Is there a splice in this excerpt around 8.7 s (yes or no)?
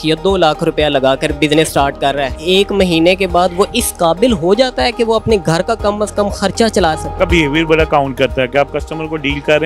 no